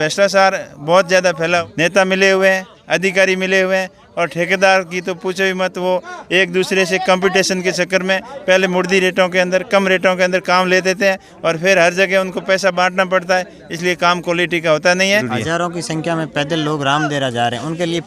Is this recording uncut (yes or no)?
no